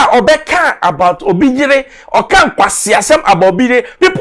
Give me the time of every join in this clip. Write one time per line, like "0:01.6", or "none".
none